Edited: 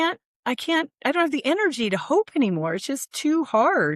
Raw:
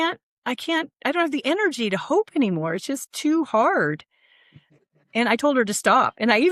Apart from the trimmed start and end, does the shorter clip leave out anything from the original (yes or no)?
no